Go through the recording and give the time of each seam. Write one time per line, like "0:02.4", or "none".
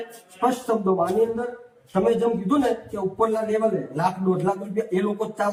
none